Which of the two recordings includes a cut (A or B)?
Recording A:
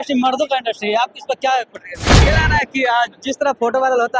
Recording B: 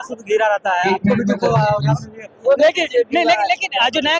A